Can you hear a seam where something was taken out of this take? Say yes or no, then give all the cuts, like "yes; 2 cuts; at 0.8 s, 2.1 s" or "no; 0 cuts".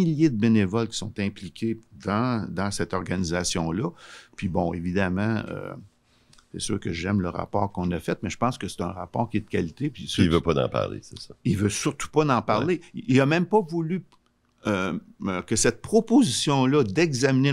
no; 0 cuts